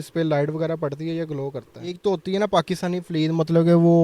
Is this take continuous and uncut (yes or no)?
no